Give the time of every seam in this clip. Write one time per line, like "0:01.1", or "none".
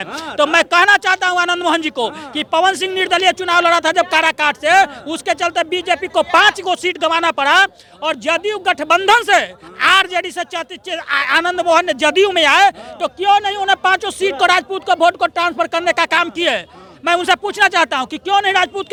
none